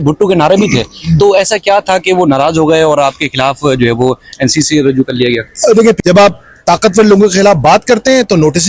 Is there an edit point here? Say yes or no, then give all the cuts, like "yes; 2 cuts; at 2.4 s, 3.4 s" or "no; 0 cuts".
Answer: yes; 1 cut; at 6.0 s